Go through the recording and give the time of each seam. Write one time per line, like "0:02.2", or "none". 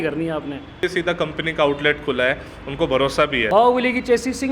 0:00.8
0:03.5